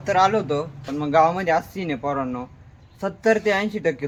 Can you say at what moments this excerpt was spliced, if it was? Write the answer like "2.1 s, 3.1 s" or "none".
none